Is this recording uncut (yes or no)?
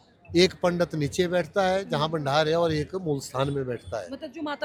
yes